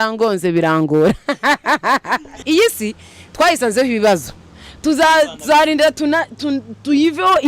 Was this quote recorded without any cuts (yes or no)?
no